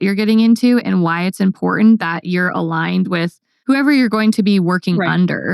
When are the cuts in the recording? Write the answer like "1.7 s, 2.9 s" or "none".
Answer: 3.5 s